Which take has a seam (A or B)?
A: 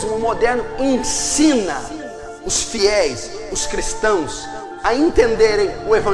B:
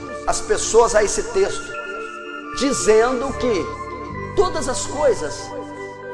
A